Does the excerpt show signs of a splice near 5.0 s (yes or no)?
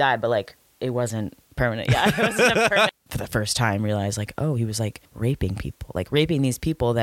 yes